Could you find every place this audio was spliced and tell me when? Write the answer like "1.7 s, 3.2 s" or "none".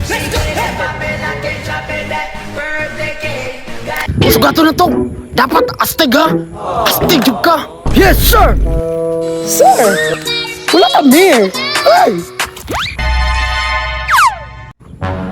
4.0 s, 13.0 s